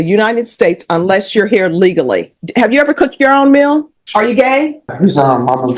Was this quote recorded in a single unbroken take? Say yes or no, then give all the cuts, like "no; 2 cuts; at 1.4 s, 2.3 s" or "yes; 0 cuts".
no; 3 cuts; at 2.4 s, 4.0 s, 4.9 s